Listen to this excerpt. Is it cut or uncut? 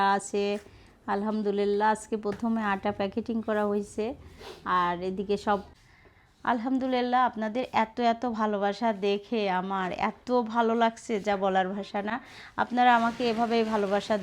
cut